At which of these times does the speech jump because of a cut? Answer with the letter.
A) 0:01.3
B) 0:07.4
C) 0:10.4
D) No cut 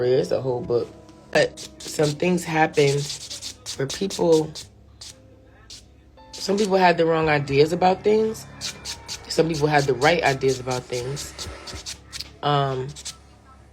A